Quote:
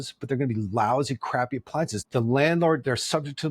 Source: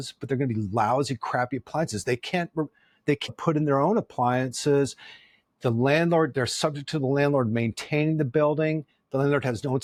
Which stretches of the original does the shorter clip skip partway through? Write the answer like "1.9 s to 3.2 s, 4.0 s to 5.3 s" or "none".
2.0 s to 5.5 s

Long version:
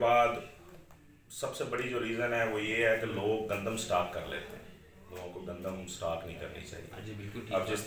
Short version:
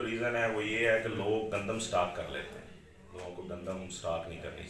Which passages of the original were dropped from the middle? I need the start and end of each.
none

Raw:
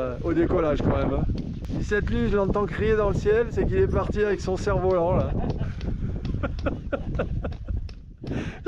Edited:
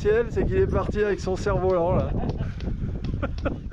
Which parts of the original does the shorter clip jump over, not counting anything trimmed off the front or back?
none

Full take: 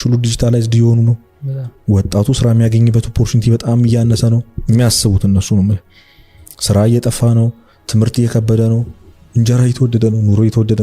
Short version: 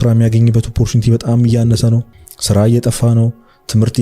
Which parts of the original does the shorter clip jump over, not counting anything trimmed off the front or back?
4.5 s to 6.3 s

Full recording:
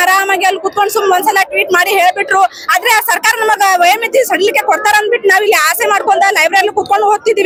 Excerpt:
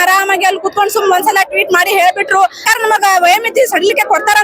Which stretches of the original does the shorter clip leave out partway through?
2.6 s to 3.2 s

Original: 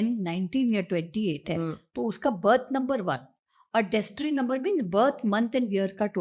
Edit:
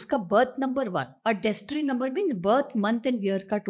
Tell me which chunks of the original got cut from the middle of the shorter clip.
3.2 s to 3.6 s

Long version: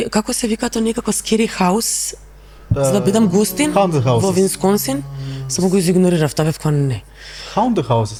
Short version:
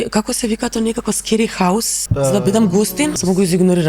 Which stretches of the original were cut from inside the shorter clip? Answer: 2.0 s to 2.6 s, 3.7 s to 5.5 s

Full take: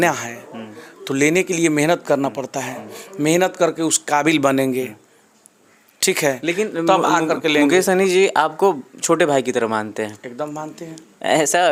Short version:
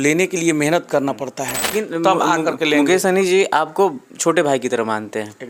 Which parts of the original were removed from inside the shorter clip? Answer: 2.9 s to 6.5 s

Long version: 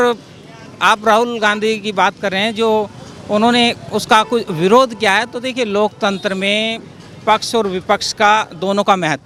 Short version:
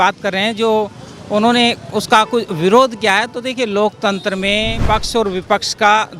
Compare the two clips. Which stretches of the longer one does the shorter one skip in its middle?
6.7 s to 7.1 s

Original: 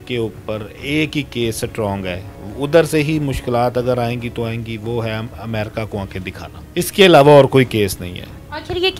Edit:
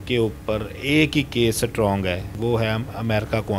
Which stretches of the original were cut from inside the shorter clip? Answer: 2.3 s to 4.7 s

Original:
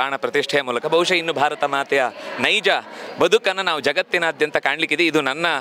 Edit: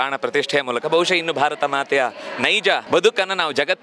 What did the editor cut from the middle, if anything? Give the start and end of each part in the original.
2.8 s to 3.1 s

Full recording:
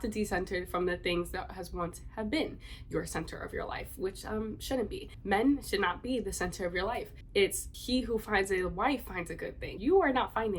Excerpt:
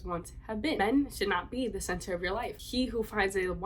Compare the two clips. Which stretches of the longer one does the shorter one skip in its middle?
2.5 s to 5.3 s, 7.1 s to 7.7 s

